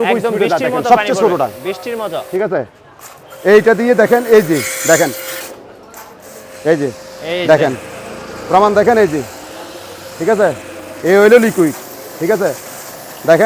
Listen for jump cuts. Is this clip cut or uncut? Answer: cut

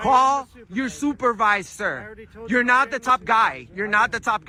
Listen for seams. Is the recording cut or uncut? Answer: uncut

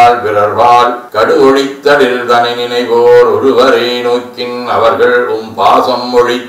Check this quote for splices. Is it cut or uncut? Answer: uncut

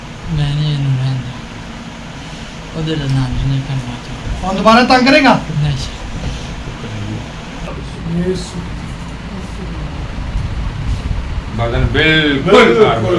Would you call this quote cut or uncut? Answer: cut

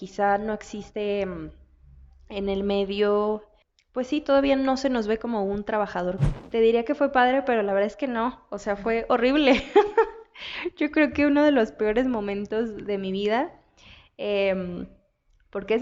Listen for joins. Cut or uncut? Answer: cut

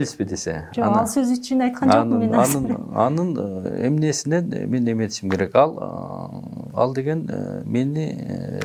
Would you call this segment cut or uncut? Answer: uncut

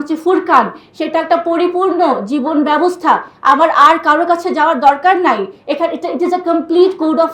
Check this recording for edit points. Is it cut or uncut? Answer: uncut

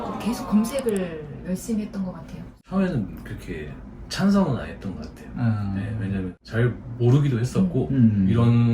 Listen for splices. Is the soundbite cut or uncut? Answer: cut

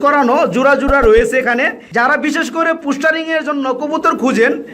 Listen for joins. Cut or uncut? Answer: uncut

